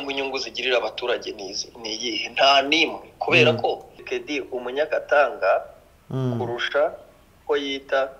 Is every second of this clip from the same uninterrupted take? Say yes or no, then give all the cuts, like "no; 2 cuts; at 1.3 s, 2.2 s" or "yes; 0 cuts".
no; 1 cut; at 3.9 s